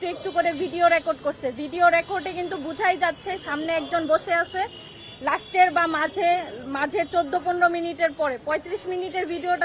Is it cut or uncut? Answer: uncut